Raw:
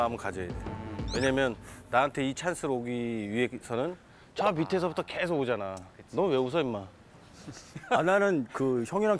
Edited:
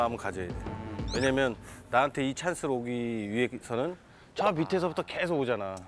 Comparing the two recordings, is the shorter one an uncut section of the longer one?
yes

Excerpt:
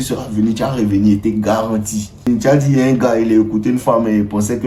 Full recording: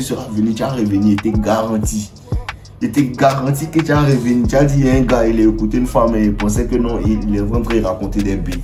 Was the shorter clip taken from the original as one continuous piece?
no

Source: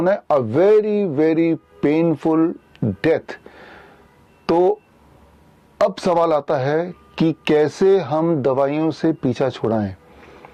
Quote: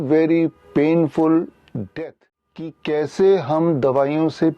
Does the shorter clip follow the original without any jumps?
no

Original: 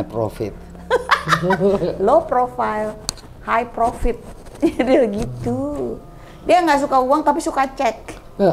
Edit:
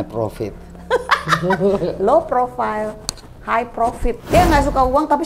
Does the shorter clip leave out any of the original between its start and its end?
yes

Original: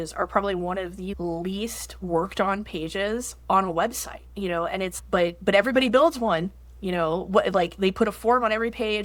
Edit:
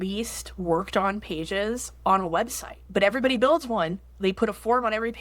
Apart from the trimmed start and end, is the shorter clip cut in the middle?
yes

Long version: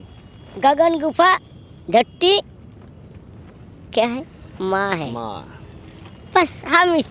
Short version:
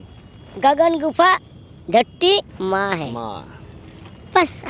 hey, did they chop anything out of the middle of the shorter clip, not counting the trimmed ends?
yes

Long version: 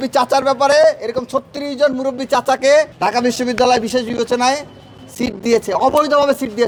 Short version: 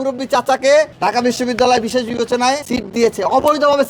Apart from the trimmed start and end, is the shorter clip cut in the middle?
yes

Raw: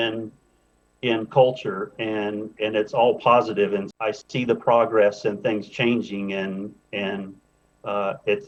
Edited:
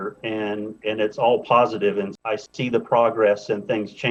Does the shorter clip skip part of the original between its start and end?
no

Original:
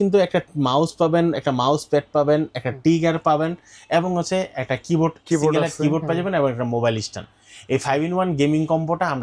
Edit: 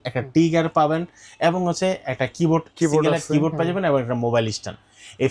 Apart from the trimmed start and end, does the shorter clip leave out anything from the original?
no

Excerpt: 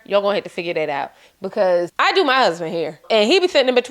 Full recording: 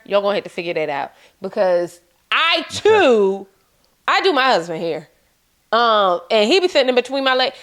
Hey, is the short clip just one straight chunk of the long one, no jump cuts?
no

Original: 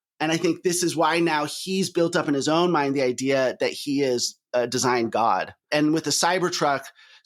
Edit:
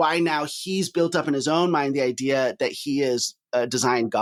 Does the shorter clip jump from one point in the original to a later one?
no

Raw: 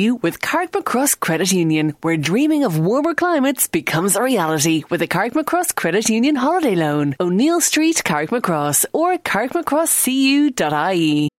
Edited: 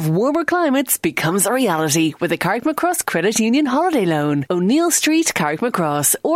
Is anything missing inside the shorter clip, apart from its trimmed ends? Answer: no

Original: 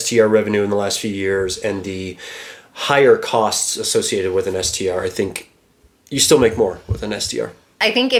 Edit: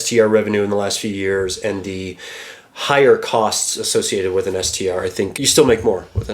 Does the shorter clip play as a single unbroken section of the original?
no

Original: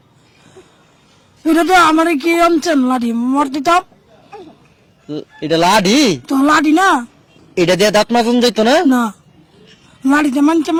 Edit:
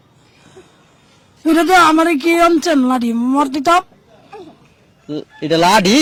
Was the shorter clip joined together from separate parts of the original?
no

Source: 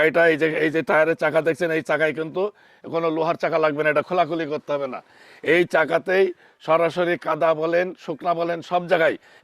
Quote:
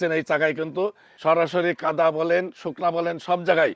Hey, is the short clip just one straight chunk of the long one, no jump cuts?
no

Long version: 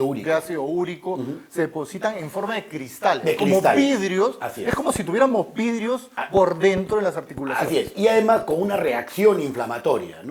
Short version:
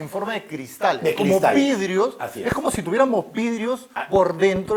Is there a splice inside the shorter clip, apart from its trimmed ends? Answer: no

